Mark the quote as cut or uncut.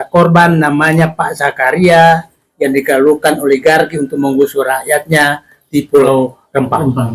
cut